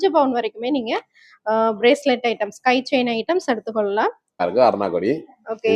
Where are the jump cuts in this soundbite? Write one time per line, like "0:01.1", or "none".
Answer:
0:04.3